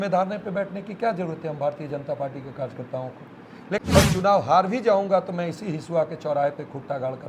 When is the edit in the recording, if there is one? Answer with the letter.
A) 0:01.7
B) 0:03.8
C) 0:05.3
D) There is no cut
B